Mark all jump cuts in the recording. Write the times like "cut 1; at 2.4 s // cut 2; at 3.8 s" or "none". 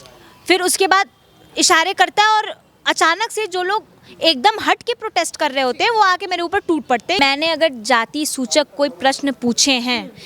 cut 1; at 7.2 s